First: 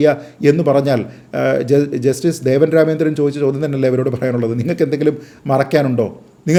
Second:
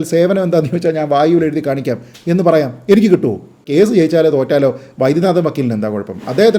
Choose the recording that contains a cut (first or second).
second